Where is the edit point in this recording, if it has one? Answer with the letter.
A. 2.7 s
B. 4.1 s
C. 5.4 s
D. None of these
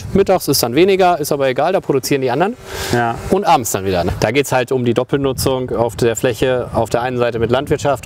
B